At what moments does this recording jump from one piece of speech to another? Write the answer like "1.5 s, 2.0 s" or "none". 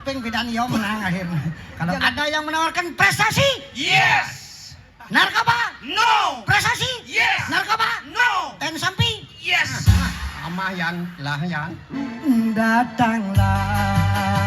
1.7 s, 12.1 s